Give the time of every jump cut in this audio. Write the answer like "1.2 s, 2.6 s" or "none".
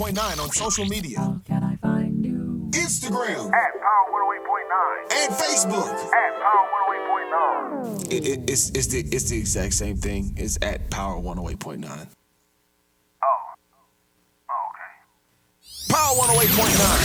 none